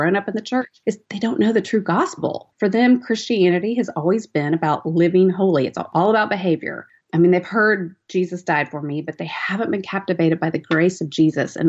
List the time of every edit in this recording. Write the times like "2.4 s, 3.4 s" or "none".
1.1 s, 5.9 s